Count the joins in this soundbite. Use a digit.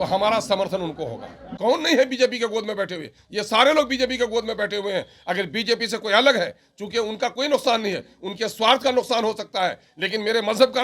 1